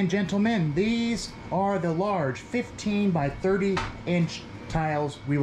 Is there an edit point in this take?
no; 0 cuts

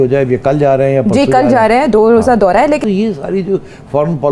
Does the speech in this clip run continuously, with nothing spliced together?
no; 1 cut; at 2.8 s

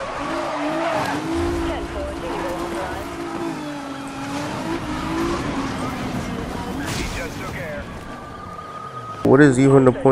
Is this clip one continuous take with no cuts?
no; 1 cut; at 9.2 s

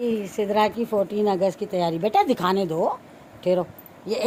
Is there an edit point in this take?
no; 0 cuts

